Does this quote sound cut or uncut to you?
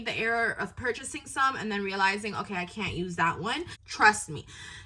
cut